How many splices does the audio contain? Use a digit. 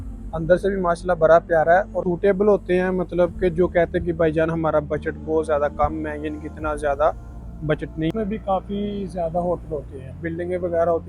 2